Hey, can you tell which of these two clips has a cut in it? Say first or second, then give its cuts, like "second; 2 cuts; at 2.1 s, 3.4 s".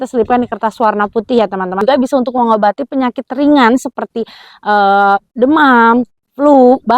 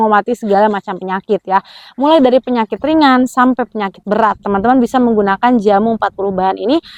first; 1 cut; at 1.8 s